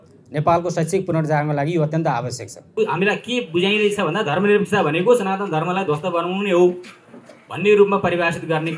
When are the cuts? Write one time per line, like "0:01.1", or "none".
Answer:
0:02.7